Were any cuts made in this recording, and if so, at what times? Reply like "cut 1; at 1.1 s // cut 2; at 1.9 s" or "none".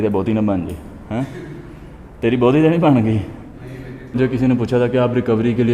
cut 1; at 4.2 s